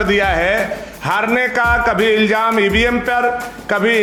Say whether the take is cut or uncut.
uncut